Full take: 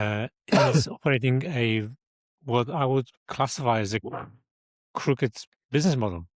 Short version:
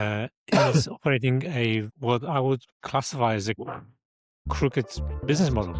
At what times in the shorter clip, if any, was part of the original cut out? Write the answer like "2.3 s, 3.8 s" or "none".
1.9 s

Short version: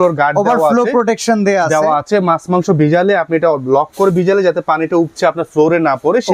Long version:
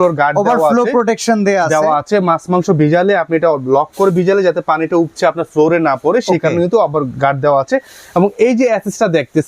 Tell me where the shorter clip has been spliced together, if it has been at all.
none

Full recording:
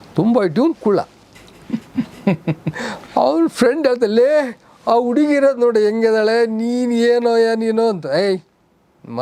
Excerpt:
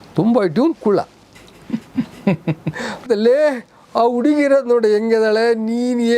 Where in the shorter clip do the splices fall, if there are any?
3.1 s

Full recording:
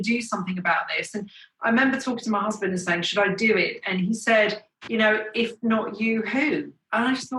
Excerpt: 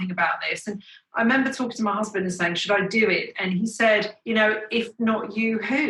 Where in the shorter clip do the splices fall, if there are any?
4.1 s

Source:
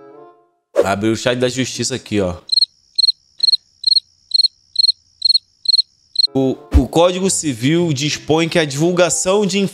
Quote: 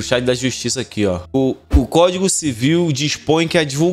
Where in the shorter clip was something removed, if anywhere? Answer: 1.2 s

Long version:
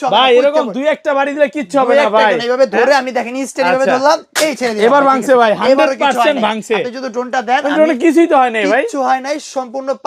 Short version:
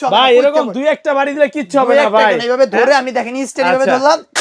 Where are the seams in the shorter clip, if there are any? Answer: none

